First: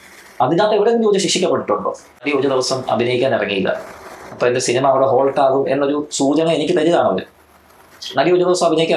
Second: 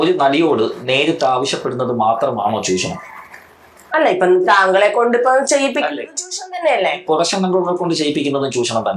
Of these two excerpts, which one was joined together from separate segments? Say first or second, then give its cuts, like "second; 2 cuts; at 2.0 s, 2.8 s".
first; 1 cut; at 2.2 s